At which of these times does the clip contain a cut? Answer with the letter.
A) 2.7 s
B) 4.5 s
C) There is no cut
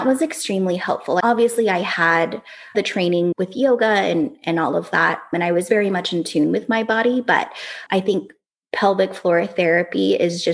A